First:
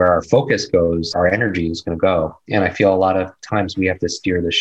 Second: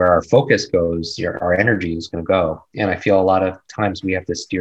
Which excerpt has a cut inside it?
first; 1 cut; at 1.1 s

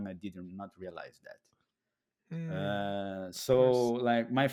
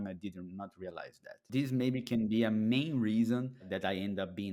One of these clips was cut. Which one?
second; 2 cuts; at 1.4 s, 3.7 s

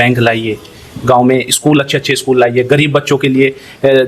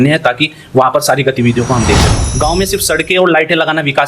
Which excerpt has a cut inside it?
second; 1 cut; at 2.2 s

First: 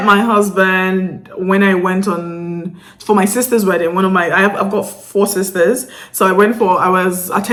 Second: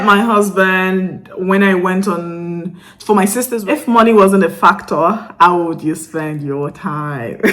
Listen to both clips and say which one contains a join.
second; 1 cut; at 3.5 s

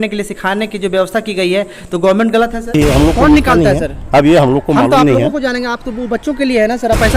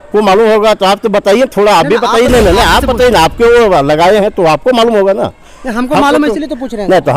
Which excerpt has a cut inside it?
first; 1 cut; at 2.8 s

